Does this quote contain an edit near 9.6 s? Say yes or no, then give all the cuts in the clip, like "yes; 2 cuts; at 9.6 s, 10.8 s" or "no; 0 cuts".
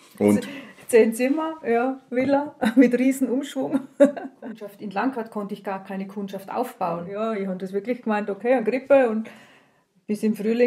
no; 2 cuts; at 4.8 s, 7.1 s